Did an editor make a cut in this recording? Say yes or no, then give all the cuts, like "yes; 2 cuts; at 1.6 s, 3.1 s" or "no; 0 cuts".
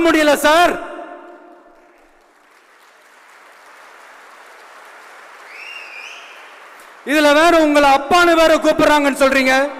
no; 0 cuts